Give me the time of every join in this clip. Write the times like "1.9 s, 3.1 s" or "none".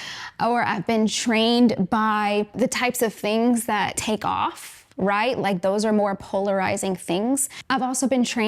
4.0 s, 7.5 s